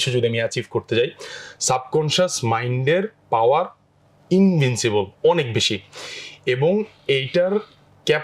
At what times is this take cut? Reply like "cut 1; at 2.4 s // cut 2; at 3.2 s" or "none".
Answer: none